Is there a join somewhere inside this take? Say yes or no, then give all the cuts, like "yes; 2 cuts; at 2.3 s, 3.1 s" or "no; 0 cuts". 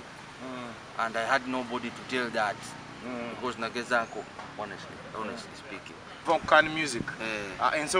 yes; 1 cut; at 6.2 s